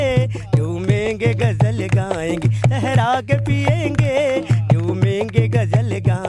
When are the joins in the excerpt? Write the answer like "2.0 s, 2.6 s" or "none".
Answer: none